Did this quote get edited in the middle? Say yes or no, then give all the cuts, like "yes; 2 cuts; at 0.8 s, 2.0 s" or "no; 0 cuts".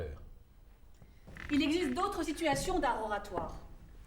yes; 1 cut; at 1.3 s